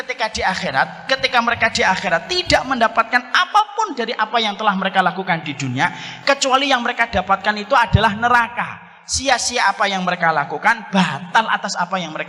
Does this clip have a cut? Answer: no; 0 cuts

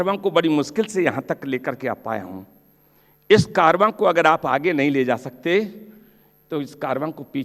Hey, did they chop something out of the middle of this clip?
no; 0 cuts

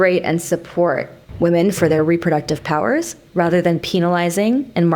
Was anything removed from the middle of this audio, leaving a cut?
yes; 1 cut; at 1.2 s

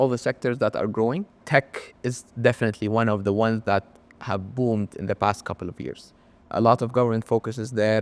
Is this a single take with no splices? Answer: no; 1 cut; at 1.3 s

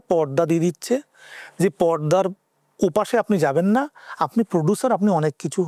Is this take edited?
no; 0 cuts

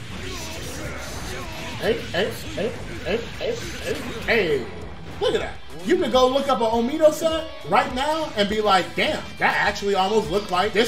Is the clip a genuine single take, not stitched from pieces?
yes; 0 cuts

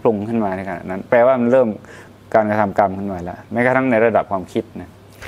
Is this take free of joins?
yes; 0 cuts

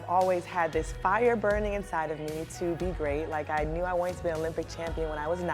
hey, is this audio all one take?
yes; 0 cuts

